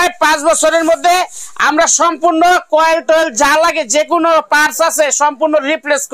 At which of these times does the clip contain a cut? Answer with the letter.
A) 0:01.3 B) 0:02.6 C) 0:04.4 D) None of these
D